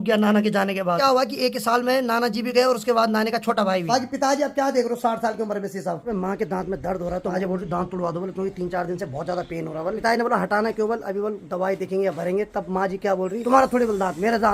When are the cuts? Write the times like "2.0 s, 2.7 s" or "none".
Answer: 1.0 s, 3.9 s, 6.1 s, 7.3 s, 10.0 s, 13.4 s